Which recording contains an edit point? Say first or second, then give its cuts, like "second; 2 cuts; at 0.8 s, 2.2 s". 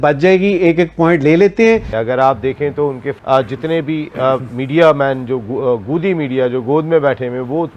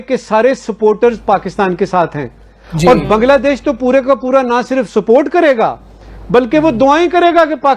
first; 2 cuts; at 1.9 s, 3.1 s